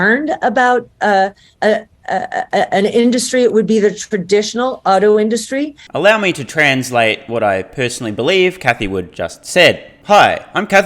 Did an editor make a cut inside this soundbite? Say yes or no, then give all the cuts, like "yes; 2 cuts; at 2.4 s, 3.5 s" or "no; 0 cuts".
no; 0 cuts